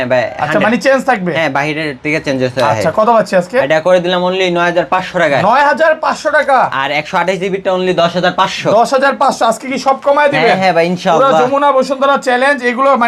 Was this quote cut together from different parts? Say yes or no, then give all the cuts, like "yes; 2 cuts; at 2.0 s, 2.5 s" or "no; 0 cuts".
no; 0 cuts